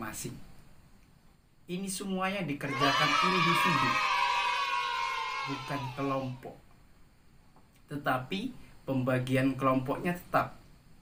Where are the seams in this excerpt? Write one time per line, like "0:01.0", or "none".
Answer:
none